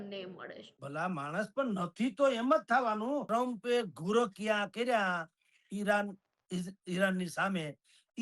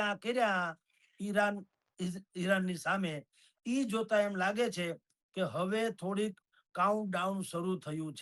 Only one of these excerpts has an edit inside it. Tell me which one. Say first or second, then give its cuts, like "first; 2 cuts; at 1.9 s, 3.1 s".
first; 1 cut; at 3.2 s